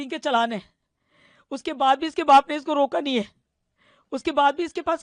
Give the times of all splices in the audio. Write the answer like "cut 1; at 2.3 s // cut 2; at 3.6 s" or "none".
none